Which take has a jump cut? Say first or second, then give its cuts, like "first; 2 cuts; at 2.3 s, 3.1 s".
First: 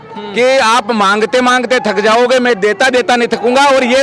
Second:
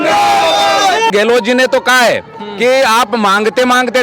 second; 1 cut; at 1.1 s